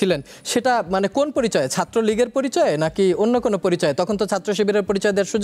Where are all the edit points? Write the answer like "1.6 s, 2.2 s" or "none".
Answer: none